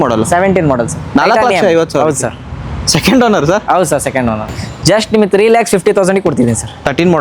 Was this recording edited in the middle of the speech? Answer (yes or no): yes